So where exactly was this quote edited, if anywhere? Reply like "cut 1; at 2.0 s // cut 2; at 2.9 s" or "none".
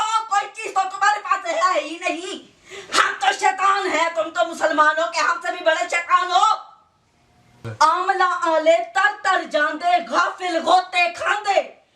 cut 1; at 7.7 s